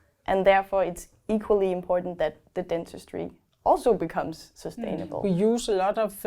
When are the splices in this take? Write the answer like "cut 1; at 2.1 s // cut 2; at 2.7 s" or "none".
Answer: cut 1; at 5.1 s